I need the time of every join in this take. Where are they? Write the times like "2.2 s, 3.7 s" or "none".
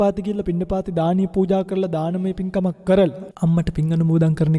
3.2 s